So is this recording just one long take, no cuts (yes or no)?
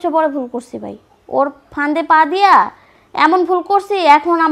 yes